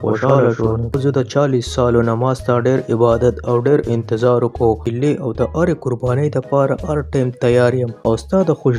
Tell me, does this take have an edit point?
yes; 3 cuts; at 0.9 s, 4.8 s, 7.9 s

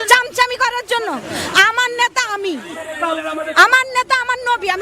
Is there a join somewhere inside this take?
yes; 1 cut; at 3.2 s

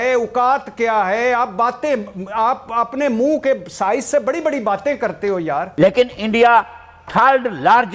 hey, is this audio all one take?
no; 1 cut; at 5.7 s

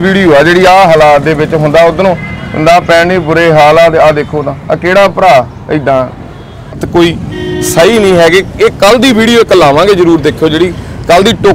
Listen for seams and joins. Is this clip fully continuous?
no; 1 cut; at 6.8 s

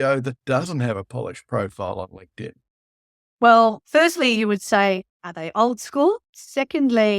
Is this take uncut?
no; 1 cut; at 6.3 s

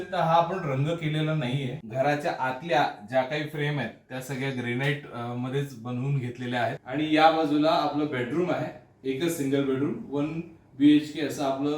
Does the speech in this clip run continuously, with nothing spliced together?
no; 2 cuts; at 1.8 s, 6.8 s

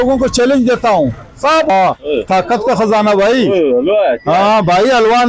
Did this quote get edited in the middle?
yes; 1 cut; at 1.7 s

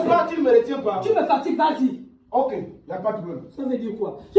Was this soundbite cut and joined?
no; 0 cuts

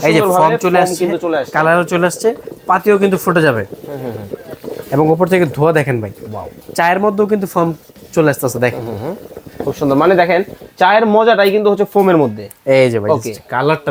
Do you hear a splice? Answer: no; 0 cuts

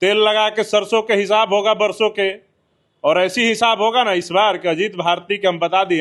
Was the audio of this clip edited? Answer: no; 0 cuts

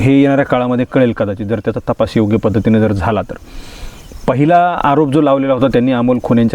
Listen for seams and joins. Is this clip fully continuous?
yes; 0 cuts

